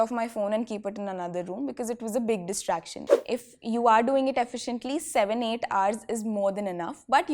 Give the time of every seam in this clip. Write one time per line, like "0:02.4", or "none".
0:03.0